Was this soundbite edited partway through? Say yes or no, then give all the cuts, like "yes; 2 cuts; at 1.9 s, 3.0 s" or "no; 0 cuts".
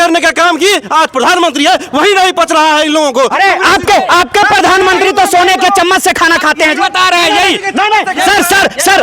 no; 0 cuts